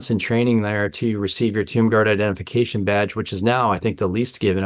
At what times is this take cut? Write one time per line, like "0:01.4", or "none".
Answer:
none